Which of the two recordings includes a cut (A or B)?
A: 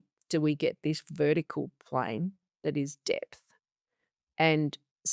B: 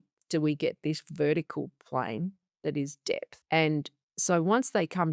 B